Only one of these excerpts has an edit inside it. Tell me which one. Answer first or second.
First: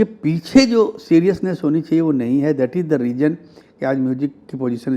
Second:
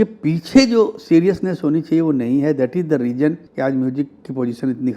second